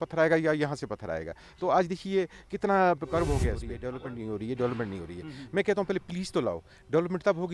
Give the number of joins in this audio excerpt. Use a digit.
1